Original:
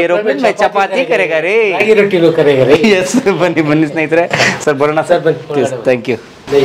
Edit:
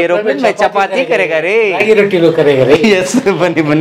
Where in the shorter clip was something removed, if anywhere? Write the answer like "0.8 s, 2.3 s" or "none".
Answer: none